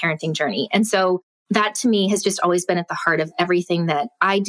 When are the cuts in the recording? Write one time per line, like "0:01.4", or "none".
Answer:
0:01.3